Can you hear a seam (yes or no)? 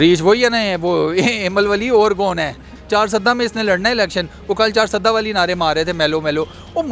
yes